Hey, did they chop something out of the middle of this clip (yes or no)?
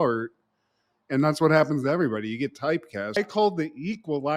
yes